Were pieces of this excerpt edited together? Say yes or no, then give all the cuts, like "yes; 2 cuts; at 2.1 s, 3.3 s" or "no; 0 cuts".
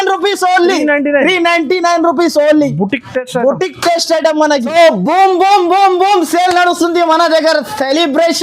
yes; 1 cut; at 4.7 s